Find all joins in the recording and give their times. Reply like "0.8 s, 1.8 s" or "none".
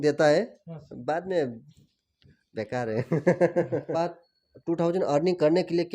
4.0 s